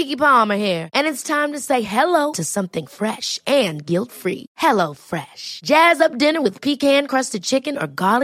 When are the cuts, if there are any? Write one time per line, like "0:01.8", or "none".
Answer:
none